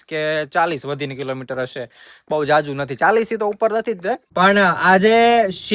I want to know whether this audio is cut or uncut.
cut